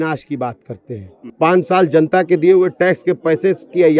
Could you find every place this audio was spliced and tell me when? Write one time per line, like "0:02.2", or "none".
0:01.3